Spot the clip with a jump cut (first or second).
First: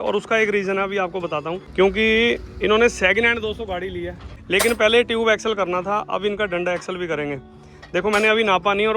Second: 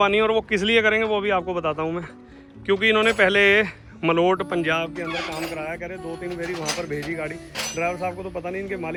first